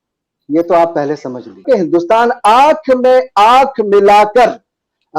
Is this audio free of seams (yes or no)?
no